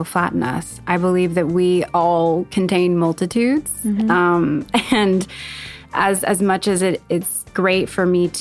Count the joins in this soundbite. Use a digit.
0